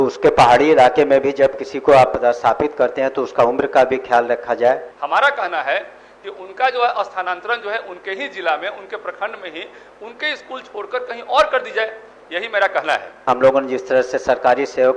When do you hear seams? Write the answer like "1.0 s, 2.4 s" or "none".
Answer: 4.9 s, 13.2 s